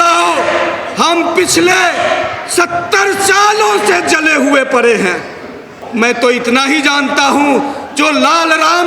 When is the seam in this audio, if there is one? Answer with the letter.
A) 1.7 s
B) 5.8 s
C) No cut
B